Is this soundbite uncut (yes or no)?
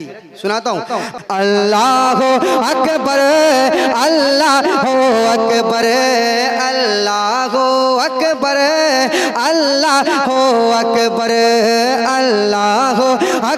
no